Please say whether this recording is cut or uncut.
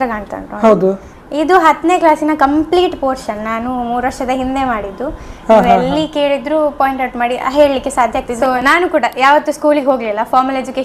cut